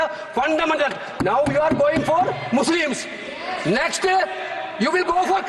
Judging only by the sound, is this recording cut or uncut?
uncut